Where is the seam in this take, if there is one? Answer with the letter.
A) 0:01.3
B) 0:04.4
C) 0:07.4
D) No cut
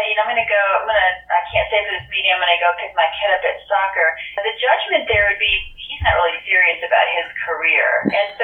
B